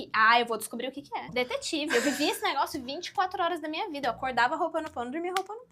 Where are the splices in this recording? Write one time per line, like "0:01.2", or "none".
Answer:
0:01.4